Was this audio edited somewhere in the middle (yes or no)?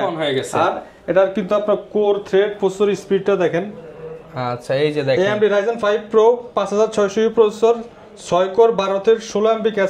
no